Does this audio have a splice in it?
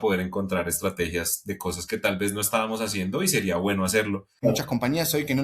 yes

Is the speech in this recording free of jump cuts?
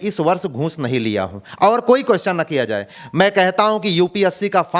no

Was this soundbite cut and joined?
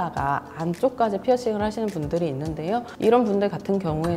no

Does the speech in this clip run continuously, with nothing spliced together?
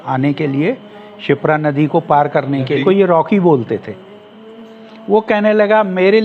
no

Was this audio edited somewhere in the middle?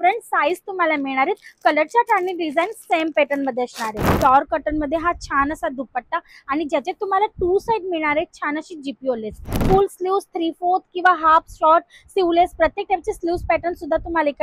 yes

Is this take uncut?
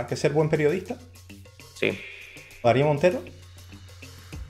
no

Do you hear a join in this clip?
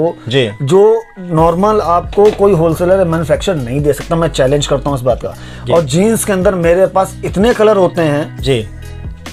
no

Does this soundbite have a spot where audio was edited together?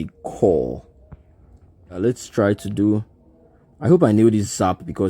yes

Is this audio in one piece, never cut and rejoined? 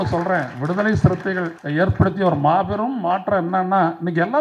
no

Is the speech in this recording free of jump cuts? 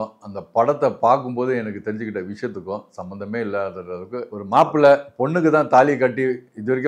no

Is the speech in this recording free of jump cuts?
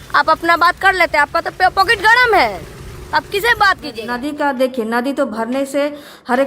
no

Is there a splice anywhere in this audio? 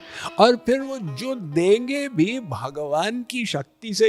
no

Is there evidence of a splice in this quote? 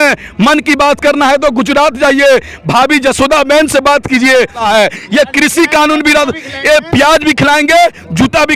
yes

